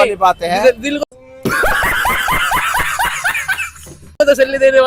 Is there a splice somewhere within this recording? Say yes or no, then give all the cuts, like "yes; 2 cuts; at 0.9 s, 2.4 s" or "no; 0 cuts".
no; 0 cuts